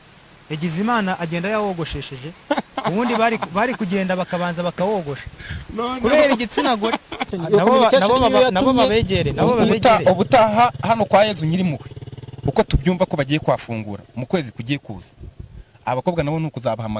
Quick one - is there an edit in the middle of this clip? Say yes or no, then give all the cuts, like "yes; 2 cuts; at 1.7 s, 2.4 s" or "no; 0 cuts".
yes; 1 cut; at 7.4 s